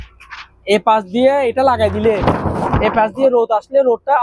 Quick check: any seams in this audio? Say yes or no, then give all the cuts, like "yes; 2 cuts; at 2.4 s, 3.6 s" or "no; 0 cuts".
no; 0 cuts